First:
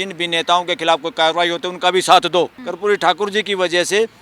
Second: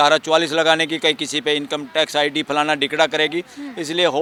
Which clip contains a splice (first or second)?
first